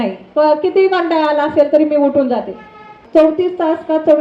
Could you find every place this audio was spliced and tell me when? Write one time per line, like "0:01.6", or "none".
0:03.0